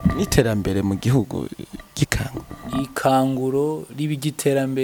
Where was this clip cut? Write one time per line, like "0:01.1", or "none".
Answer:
none